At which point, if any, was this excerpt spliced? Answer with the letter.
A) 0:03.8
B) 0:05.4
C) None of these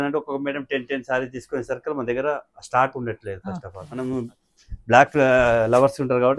A